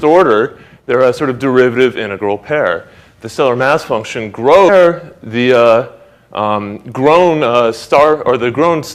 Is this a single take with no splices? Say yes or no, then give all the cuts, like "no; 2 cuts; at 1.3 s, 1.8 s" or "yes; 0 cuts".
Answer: yes; 0 cuts